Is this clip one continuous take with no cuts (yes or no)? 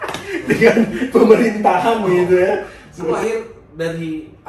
no